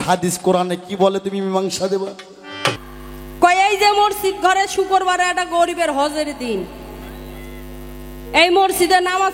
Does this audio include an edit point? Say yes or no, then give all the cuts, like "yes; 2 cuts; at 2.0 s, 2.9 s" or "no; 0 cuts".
yes; 1 cut; at 2.8 s